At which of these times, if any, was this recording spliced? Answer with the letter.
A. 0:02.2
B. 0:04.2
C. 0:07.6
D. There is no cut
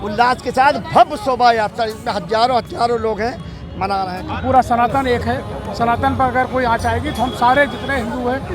B